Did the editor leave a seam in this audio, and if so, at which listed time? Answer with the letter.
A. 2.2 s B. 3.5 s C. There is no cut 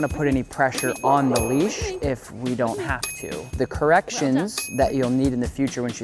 B